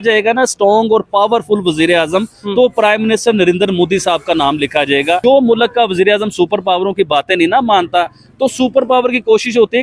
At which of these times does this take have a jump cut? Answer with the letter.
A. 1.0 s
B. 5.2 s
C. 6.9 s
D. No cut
B